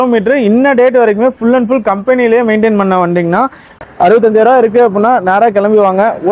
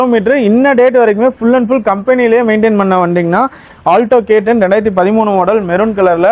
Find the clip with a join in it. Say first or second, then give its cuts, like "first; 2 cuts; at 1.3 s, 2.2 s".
first; 1 cut; at 3.6 s